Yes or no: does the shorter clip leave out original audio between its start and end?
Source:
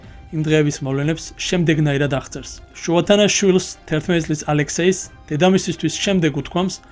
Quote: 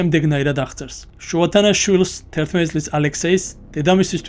no